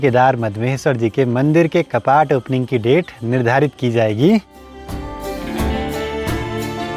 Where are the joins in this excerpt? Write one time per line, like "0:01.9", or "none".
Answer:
none